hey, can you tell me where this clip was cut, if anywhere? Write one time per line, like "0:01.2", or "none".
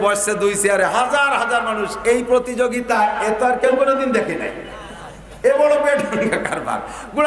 none

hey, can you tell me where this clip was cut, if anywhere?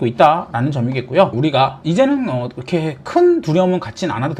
0:01.3

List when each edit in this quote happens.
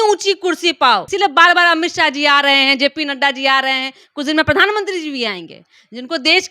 0:01.1

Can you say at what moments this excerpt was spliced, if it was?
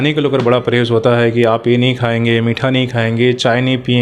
none

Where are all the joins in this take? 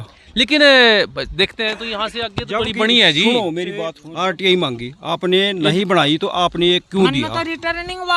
0:03.9

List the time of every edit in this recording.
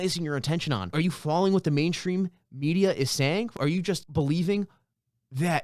0:00.9
0:03.5

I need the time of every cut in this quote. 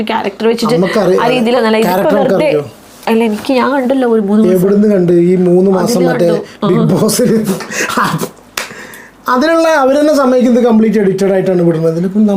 none

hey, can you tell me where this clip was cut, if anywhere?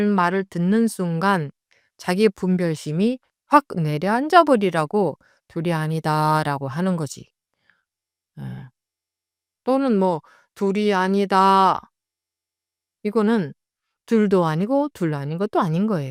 none

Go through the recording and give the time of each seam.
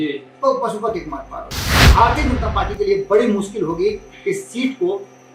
0:01.9

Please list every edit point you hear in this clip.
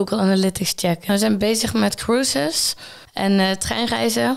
0:01.1

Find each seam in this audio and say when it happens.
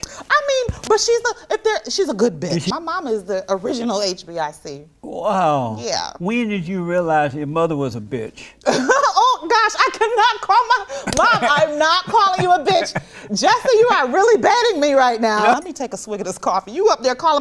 0:02.7
0:15.5

